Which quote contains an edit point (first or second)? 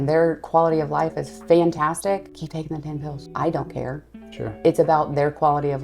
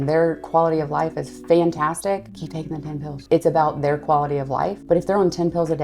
second